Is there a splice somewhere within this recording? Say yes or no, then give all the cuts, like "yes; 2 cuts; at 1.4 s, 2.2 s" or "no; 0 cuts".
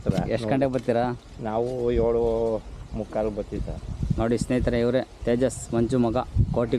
yes; 1 cut; at 4.0 s